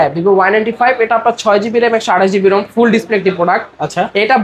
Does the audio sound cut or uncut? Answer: uncut